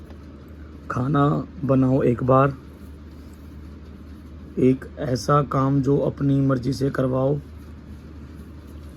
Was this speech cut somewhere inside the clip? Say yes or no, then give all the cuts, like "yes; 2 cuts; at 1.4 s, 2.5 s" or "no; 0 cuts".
no; 0 cuts